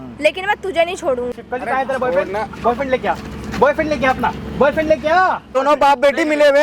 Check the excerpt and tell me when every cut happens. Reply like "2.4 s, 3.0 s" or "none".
1.4 s, 5.6 s